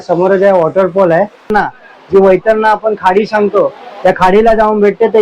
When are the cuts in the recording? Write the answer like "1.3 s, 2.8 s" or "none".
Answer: 1.5 s